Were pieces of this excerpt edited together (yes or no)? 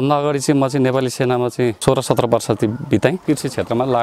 yes